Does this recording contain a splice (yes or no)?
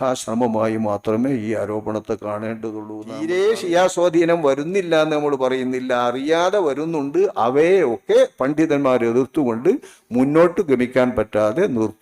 yes